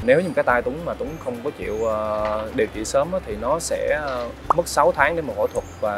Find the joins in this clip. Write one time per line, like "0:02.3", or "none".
none